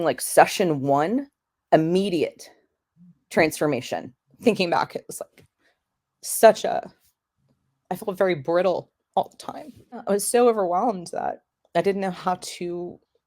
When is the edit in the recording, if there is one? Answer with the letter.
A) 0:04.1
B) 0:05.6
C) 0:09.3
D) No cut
A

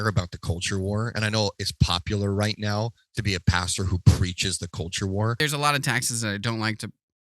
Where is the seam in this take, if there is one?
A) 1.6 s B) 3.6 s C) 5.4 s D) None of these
C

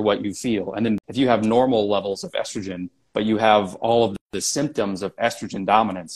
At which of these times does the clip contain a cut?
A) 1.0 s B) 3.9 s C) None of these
A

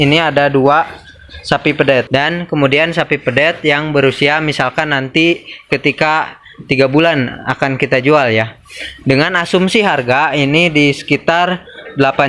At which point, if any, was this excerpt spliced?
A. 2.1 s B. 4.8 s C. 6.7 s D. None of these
A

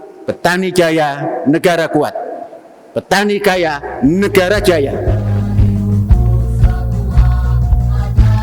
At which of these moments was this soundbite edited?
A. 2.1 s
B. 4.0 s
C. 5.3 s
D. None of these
C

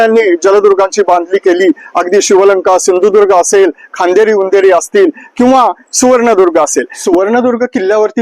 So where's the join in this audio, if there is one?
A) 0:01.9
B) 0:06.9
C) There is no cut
B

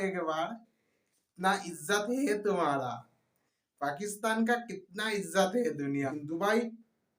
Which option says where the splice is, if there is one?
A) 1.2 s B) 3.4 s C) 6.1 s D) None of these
C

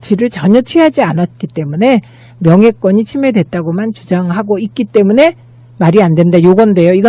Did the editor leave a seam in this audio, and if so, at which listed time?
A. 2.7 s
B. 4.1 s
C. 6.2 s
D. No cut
A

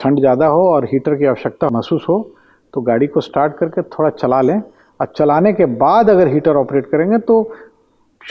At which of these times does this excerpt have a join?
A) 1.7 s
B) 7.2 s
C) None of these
A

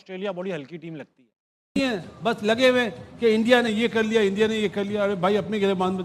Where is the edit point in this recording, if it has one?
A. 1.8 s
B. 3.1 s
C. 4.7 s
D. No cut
A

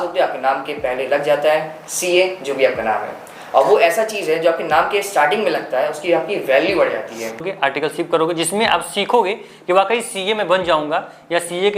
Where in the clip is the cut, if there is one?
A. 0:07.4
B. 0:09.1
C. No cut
A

